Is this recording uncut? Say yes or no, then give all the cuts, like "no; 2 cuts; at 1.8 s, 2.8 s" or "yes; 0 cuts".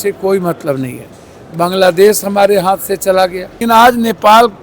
no; 1 cut; at 3.6 s